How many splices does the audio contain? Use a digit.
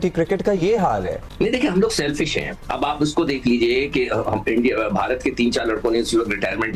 1